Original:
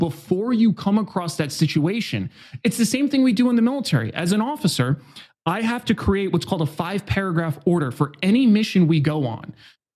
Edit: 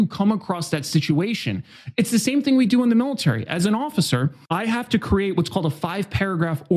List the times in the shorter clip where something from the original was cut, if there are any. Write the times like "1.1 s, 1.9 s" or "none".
4.4 s